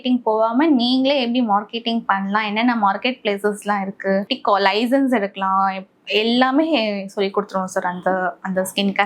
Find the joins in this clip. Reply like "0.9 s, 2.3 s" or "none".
4.3 s